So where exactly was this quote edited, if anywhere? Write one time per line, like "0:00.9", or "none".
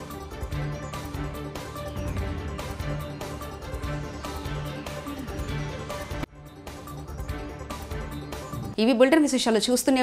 none